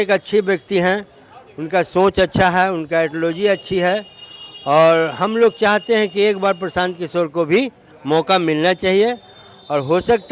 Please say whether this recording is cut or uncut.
uncut